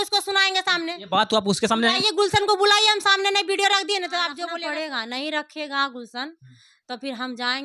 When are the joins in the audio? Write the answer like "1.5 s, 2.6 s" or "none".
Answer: 4.5 s